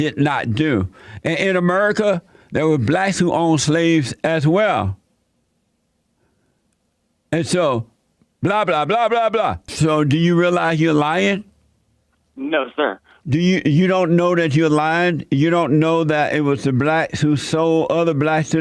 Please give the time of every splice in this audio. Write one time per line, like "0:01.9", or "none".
0:09.6
0:13.1